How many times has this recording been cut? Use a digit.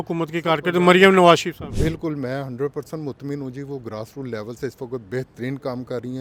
0